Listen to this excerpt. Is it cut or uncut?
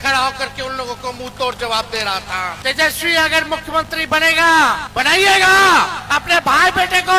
cut